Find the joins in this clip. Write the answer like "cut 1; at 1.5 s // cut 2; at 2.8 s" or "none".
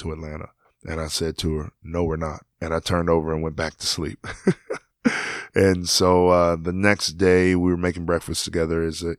none